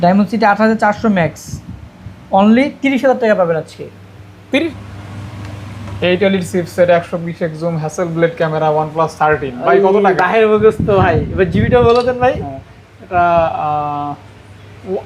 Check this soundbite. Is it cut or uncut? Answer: cut